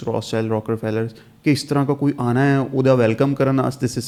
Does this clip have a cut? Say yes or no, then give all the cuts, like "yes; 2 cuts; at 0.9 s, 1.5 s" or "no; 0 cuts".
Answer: no; 0 cuts